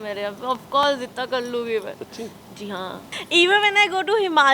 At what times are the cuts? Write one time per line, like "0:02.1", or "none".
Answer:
0:03.1